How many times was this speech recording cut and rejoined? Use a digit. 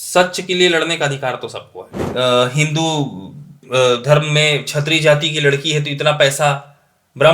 1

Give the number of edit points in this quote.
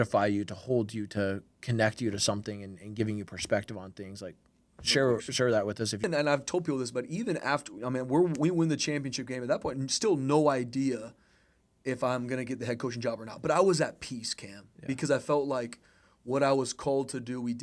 1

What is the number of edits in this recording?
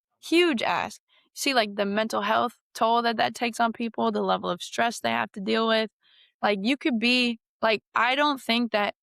0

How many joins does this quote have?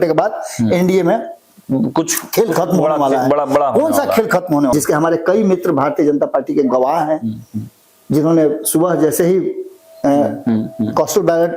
1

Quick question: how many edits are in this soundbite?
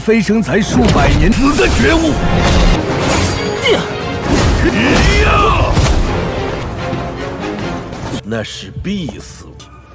1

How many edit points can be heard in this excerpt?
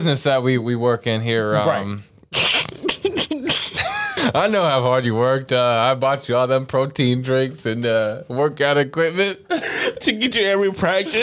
1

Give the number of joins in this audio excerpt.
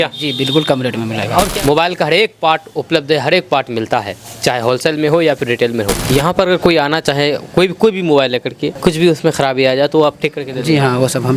3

